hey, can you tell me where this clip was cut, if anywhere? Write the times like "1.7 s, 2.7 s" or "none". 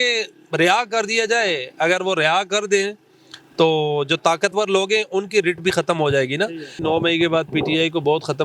6.8 s